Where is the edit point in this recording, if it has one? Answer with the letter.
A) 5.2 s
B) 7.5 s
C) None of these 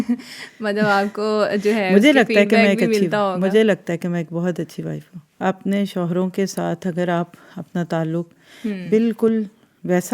A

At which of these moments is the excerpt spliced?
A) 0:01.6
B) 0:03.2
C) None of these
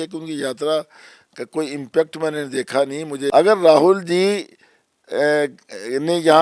B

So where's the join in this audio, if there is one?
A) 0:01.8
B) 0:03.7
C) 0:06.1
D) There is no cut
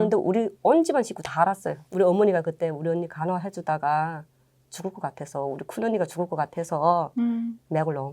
A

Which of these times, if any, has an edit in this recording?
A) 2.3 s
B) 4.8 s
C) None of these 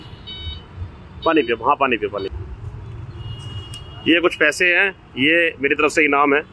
A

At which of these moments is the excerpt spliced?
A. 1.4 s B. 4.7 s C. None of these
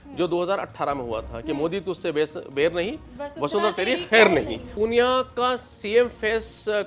B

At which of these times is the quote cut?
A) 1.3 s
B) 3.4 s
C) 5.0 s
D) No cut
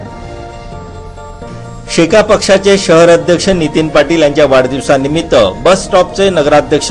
A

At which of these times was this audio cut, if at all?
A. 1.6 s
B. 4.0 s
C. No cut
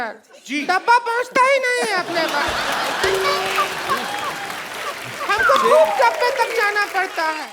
C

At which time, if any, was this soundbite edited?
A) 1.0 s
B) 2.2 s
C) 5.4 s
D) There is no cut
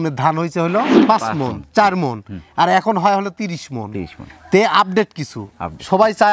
A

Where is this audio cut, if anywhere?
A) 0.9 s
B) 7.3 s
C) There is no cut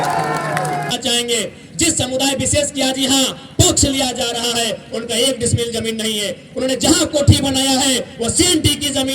A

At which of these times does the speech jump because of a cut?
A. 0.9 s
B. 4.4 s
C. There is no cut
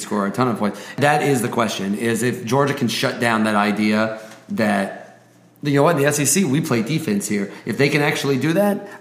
A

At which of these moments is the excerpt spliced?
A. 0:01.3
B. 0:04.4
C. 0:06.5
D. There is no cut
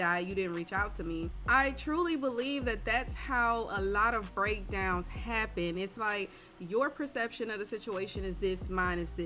A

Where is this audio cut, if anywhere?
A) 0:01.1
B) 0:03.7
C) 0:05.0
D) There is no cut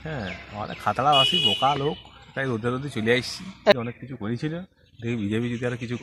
B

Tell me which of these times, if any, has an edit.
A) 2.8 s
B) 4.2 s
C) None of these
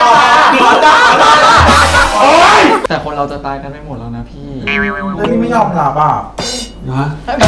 A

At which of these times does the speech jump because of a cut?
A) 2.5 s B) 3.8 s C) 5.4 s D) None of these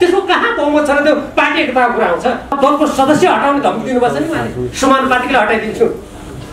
A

